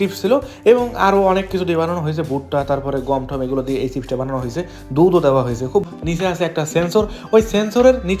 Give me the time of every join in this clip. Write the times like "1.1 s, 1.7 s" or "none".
5.8 s